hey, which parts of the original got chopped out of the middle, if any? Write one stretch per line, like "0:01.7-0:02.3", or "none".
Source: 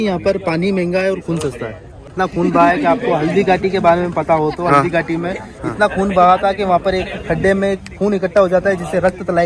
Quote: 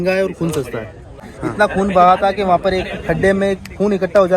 0:02.0-0:05.4

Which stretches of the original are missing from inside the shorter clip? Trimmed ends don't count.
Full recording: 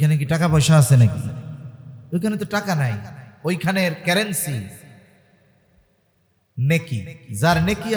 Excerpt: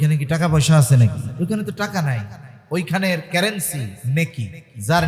0:01.2-0:02.0
0:04.7-0:06.5

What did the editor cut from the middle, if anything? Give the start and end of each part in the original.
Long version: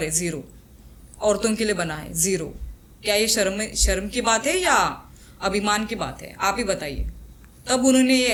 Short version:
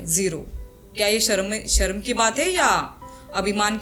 none

